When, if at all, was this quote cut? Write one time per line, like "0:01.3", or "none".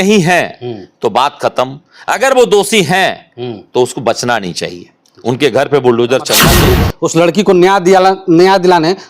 0:06.7